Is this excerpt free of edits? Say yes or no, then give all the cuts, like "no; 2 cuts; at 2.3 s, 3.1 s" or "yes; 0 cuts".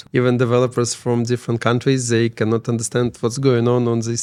yes; 0 cuts